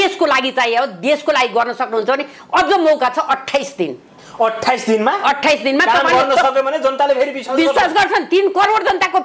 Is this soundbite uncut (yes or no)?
yes